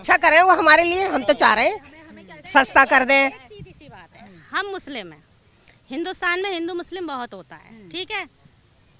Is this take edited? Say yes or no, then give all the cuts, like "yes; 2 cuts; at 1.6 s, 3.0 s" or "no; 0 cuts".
no; 0 cuts